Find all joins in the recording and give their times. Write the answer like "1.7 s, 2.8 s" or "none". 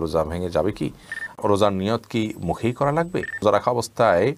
1.3 s, 3.4 s